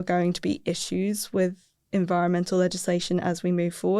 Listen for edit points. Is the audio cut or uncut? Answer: cut